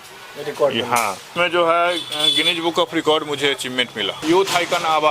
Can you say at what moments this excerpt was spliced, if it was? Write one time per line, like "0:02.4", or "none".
0:01.3
0:04.1